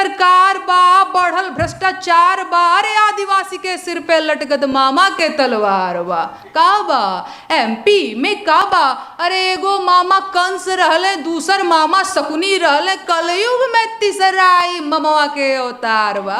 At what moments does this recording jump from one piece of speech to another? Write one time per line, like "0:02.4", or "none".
none